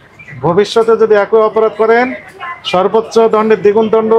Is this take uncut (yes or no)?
yes